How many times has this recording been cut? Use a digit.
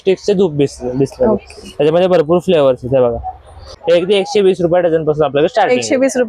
1